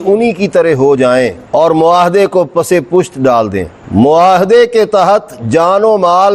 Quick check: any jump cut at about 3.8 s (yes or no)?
yes